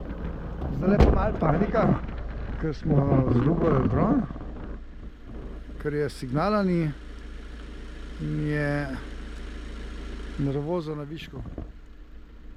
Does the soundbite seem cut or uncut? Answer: uncut